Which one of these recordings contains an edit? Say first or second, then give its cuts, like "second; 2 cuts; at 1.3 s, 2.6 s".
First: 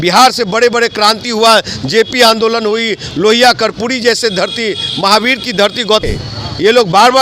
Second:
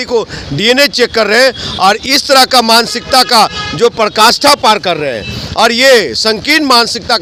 first; 1 cut; at 6.0 s